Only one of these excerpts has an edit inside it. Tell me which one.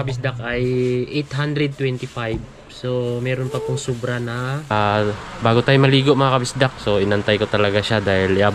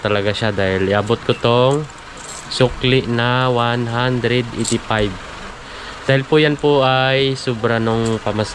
first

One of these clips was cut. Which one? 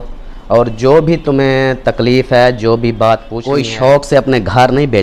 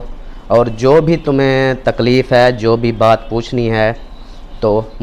first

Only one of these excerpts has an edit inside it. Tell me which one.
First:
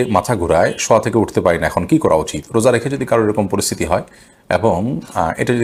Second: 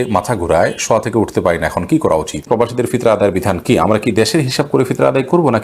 second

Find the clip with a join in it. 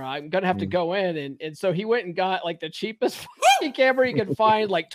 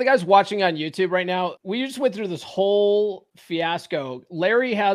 second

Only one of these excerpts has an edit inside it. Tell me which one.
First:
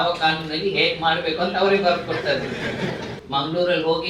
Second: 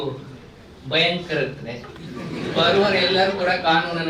first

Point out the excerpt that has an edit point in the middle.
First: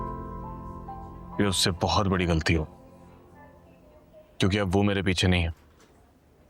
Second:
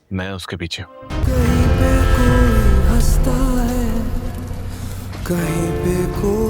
second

